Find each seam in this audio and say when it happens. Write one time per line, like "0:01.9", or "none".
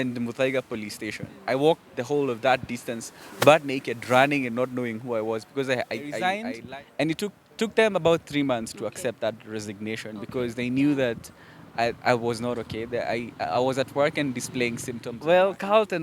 0:06.3
0:15.0